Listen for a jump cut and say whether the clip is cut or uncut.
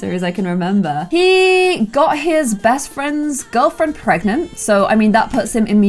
cut